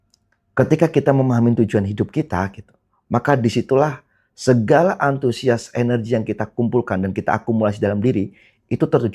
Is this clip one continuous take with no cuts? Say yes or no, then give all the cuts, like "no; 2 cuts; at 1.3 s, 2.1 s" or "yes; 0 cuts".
yes; 0 cuts